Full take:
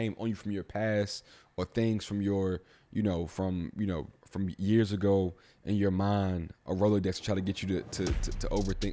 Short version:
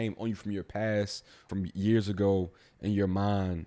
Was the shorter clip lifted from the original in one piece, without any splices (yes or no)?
no